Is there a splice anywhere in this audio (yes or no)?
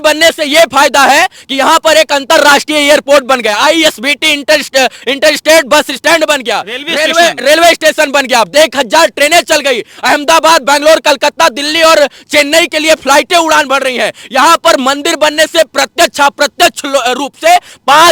no